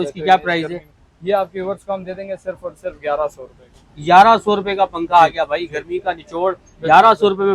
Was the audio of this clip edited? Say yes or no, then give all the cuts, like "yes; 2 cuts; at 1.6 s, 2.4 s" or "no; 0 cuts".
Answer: no; 0 cuts